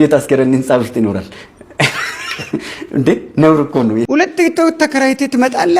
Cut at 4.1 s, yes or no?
yes